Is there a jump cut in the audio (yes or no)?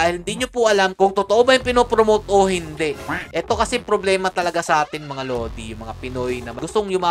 yes